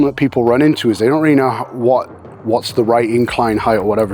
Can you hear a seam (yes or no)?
no